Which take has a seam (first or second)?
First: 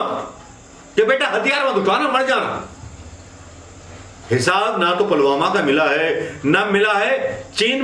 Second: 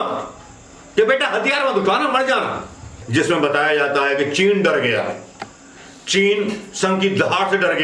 second